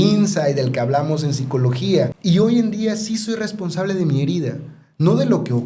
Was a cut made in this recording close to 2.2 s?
yes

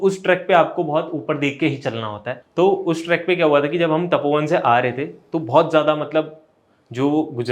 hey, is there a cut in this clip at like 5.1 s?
no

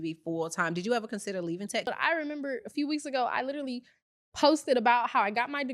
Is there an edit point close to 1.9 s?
yes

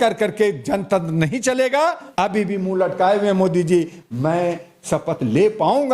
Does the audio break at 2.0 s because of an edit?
yes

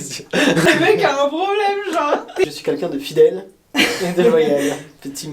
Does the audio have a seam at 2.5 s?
yes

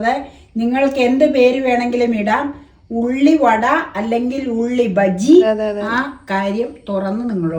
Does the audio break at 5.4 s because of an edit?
yes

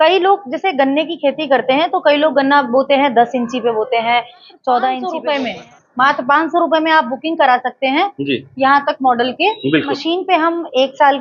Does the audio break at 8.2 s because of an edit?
no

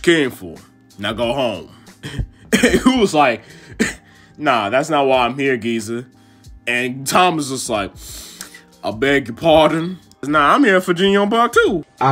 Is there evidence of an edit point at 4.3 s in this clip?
no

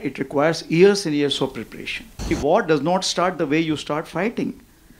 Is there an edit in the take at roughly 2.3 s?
yes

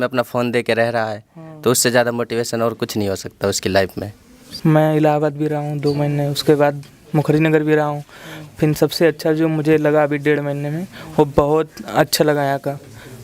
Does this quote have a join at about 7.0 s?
no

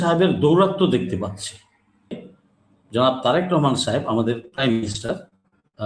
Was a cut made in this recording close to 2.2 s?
yes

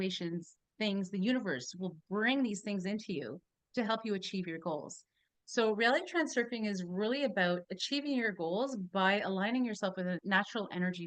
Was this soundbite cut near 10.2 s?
yes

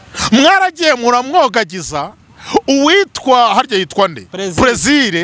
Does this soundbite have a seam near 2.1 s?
no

